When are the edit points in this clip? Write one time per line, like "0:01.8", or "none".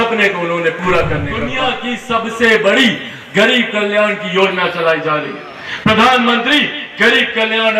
0:01.5